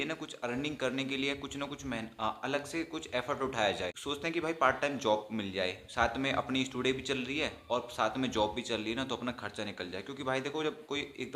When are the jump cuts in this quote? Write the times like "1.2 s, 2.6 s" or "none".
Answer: 4.0 s